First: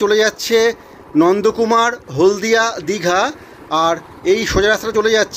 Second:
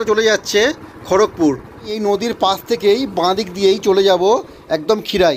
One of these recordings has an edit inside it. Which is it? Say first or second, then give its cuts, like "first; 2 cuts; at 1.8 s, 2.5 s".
second; 1 cut; at 1.9 s